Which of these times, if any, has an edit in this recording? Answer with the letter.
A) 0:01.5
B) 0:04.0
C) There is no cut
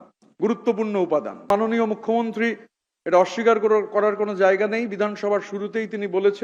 A